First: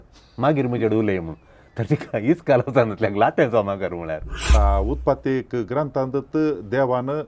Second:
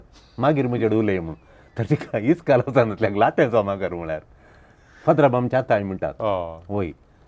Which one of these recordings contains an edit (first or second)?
first